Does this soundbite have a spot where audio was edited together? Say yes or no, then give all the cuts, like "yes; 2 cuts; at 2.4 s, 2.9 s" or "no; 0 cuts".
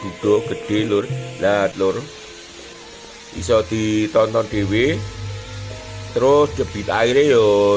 yes; 1 cut; at 1.7 s